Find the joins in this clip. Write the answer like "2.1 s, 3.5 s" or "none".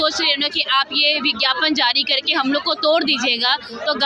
none